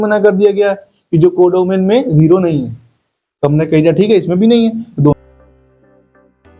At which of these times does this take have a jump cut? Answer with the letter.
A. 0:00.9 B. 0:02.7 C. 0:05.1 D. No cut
C